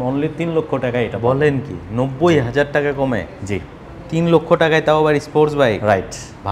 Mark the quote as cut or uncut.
uncut